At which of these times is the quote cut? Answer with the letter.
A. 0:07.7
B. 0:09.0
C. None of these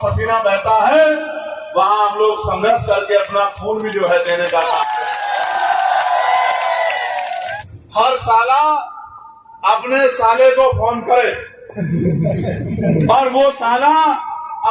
A